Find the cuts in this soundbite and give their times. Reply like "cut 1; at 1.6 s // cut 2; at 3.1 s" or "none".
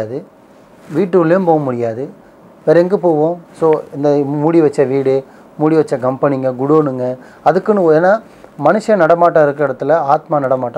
none